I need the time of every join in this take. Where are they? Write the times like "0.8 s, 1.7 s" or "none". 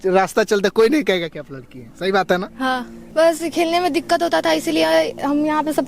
3.0 s